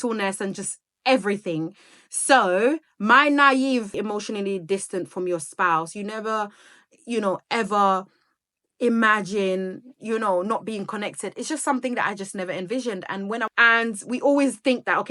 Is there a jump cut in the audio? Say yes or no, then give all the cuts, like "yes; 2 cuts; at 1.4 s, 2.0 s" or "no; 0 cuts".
yes; 2 cuts; at 3.9 s, 13.4 s